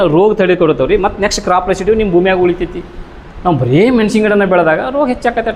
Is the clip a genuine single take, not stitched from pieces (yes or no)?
yes